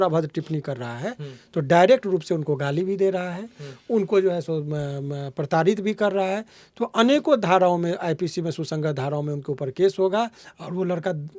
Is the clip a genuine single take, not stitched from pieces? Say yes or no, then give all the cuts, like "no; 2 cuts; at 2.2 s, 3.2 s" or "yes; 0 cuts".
yes; 0 cuts